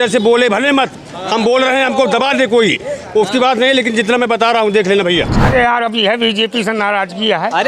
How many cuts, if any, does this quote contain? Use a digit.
1